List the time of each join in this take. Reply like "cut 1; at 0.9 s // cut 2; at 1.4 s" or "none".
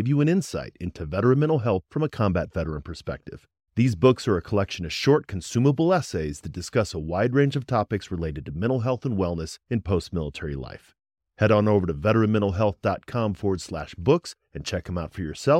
none